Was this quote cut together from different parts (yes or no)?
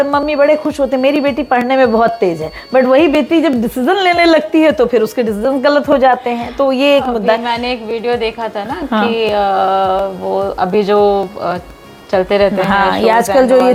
no